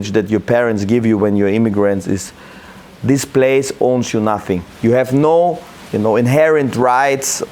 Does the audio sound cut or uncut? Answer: uncut